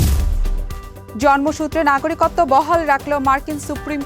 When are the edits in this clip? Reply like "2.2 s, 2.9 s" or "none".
0.9 s